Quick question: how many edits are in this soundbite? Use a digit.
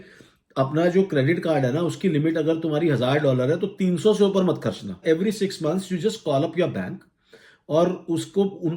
1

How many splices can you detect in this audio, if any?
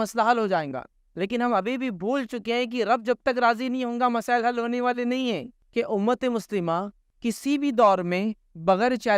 2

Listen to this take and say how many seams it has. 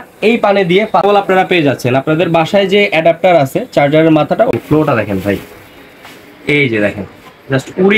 2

